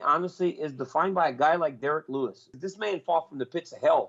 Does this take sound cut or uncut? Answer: cut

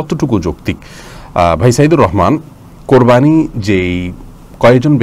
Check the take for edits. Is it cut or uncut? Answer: uncut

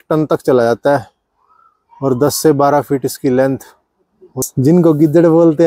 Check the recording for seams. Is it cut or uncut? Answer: cut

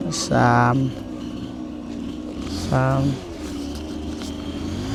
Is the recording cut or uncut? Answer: uncut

